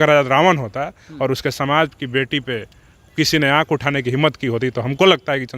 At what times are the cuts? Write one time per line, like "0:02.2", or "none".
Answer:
none